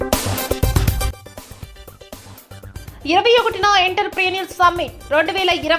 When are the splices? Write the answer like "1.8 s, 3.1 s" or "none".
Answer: 1.1 s, 2.7 s